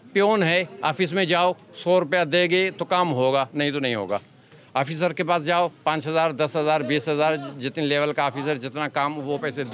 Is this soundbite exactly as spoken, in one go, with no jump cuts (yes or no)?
yes